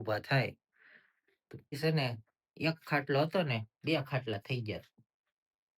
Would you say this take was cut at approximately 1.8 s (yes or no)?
yes